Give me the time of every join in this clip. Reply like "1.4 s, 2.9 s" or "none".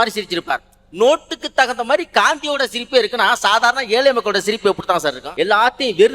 5.2 s

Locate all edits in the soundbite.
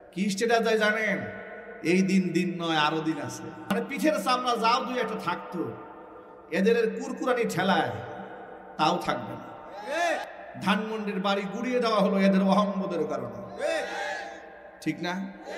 3.6 s, 10.3 s

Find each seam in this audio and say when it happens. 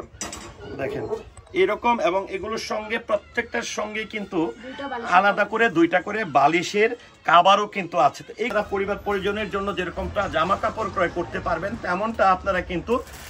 8.5 s

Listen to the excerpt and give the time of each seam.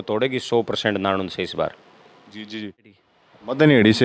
2.9 s

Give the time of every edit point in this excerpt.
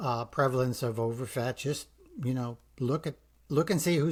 none

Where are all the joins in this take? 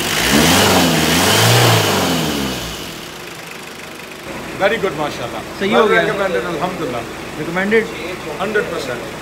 4.3 s

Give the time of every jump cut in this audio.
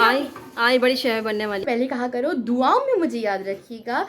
1.7 s

